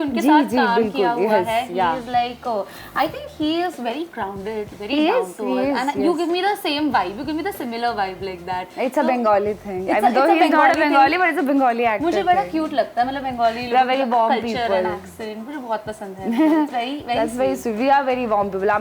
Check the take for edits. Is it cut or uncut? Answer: uncut